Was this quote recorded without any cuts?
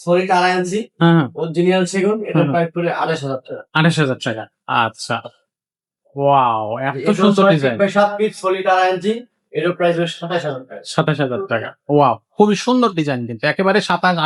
yes; 0 cuts

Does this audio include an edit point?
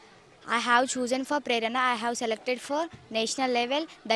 no; 0 cuts

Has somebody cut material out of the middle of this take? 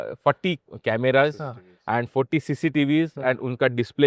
no; 0 cuts

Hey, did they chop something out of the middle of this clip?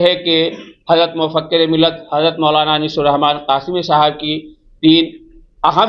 no; 0 cuts

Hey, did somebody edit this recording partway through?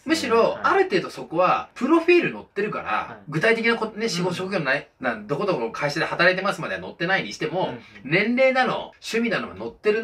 no; 0 cuts

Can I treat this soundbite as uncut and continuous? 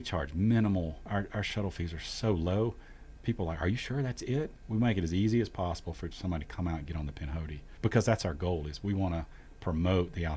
no; 3 cuts; at 1.0 s, 4.6 s, 7.6 s

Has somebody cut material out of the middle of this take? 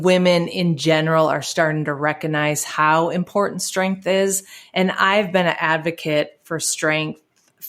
no; 0 cuts

